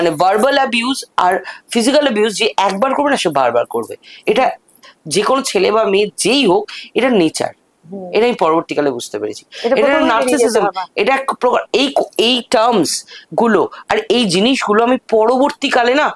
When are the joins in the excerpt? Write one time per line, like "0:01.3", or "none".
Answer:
none